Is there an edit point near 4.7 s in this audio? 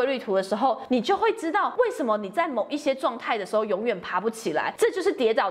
yes; 3 cuts; at 0.8 s, 1.7 s, 4.7 s

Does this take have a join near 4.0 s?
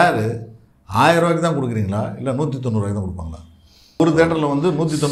yes; 1 cut; at 4.0 s

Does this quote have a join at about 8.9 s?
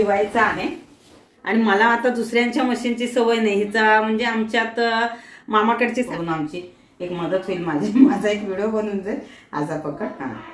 no; 1 cut; at 6.1 s

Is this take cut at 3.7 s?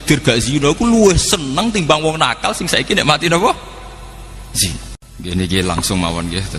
no; 1 cut; at 5.0 s

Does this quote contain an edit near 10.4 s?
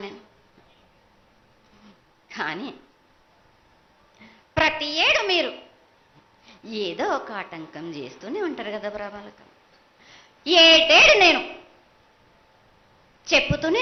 no; 0 cuts

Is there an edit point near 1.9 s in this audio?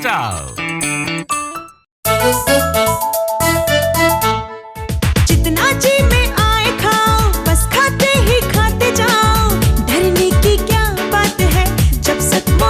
yes; 1 cut; at 1.9 s

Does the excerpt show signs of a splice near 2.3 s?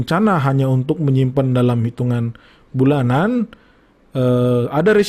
no; 0 cuts

